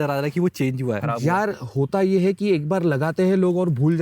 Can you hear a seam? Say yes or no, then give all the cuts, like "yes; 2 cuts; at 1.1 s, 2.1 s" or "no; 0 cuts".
yes; 1 cut; at 1.0 s